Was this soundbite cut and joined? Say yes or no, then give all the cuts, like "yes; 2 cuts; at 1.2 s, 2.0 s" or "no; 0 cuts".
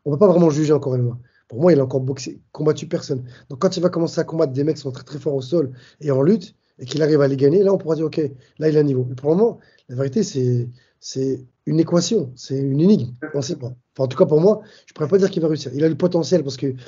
no; 0 cuts